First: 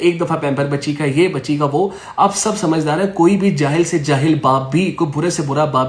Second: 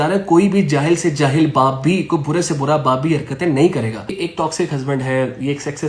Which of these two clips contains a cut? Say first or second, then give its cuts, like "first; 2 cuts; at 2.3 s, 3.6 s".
second; 1 cut; at 4.2 s